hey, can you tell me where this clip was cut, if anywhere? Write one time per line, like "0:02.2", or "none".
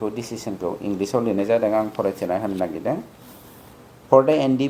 none